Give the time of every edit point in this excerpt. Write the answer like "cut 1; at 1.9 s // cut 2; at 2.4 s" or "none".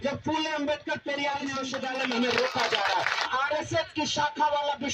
cut 1; at 1.6 s // cut 2; at 3.3 s